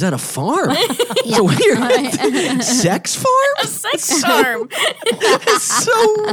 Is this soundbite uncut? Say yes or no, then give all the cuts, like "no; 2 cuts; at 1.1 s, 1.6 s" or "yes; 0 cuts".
yes; 0 cuts